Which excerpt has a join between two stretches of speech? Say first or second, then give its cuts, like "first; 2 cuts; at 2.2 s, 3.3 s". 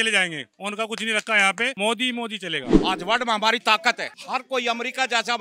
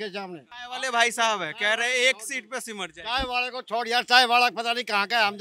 first; 3 cuts; at 1.7 s, 2.7 s, 4.1 s